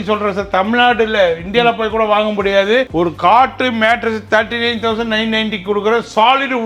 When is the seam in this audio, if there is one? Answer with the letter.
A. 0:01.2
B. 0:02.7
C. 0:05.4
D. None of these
D